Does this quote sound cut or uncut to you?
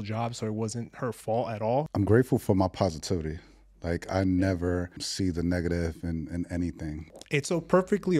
cut